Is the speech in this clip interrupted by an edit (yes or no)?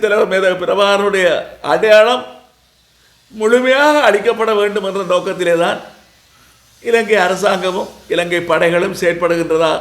no